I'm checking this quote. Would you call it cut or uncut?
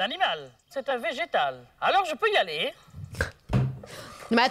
cut